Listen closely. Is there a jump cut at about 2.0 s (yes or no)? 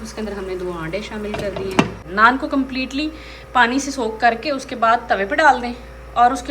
yes